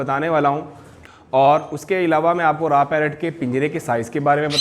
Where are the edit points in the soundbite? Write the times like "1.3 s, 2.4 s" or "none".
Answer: 0.9 s